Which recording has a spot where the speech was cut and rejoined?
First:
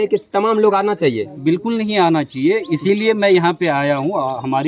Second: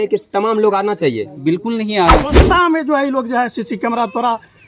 second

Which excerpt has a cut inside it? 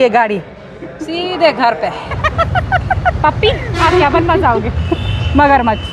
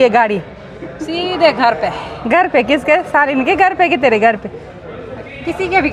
first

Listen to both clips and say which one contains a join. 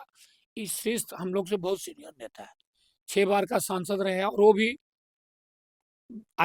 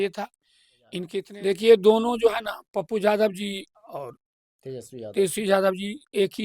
second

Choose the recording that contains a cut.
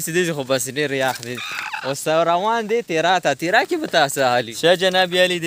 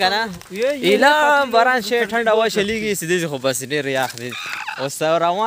first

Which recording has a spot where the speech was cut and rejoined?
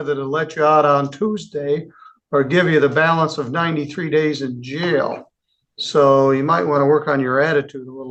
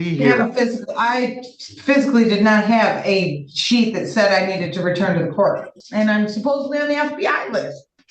second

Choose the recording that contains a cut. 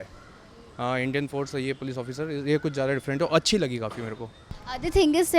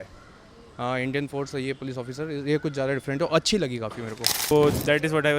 second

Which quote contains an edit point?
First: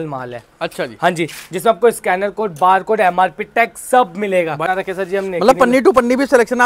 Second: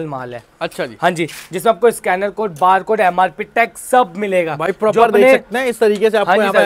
first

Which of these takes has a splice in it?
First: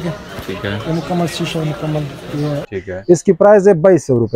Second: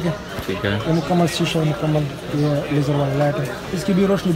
first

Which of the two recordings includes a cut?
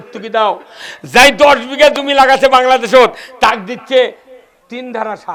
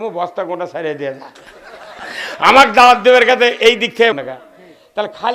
second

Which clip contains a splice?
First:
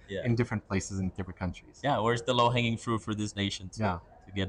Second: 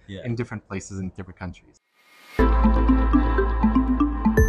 second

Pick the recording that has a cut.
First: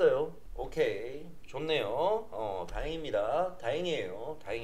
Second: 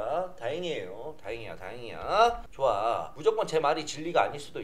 second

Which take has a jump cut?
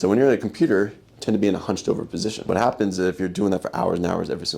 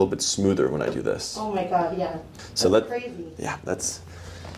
first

